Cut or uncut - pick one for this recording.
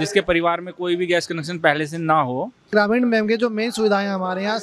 cut